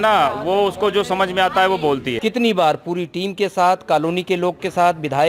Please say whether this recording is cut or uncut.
cut